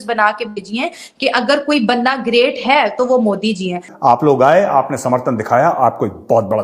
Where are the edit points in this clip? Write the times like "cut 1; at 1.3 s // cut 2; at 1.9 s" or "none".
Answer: cut 1; at 3.9 s